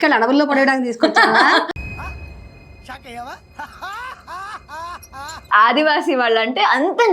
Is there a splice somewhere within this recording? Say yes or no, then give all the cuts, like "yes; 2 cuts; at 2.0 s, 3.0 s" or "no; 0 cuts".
yes; 1 cut; at 5.5 s